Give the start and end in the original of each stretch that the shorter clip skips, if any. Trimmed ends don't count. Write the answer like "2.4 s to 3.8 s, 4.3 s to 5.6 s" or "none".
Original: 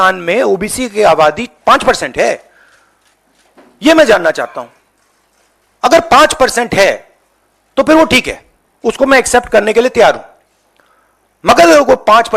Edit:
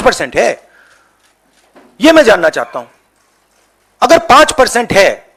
none

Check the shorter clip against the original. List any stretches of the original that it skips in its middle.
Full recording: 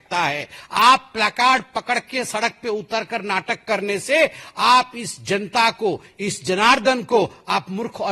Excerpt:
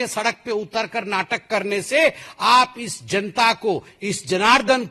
none

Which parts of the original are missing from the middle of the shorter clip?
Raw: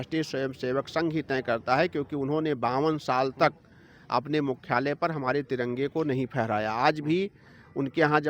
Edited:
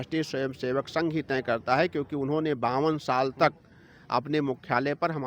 none

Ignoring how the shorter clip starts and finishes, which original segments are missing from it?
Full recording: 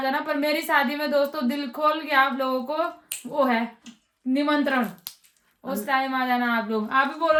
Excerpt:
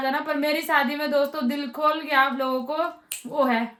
none

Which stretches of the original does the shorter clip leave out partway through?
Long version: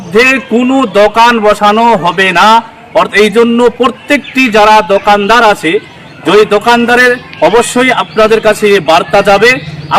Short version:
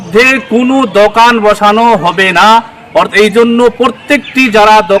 none

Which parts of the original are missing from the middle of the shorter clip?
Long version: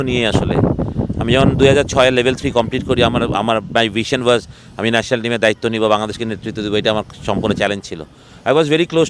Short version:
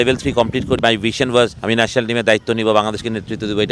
3.0 s to 3.7 s, 4.5 s to 4.7 s

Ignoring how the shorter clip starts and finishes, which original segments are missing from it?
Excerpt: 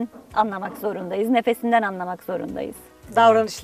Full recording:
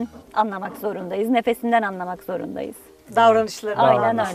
none

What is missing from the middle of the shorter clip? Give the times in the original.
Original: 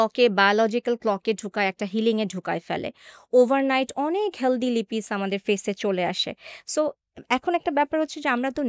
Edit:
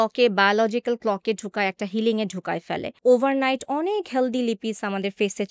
2.9 s to 3.2 s

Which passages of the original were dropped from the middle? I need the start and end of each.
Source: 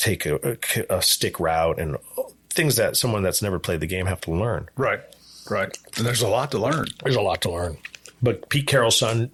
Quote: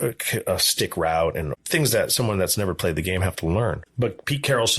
2.0 s to 2.4 s, 4.7 s to 8.1 s

